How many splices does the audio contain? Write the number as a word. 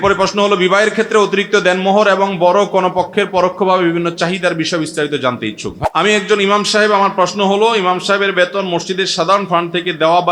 one